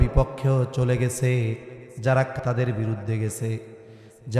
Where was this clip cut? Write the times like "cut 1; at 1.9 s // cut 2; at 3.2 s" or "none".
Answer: cut 1; at 2.4 s